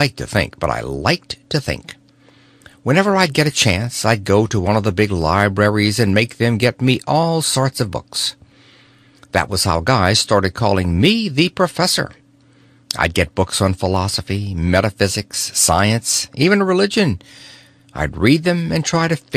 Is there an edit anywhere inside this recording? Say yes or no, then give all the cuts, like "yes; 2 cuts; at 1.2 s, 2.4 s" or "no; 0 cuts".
no; 0 cuts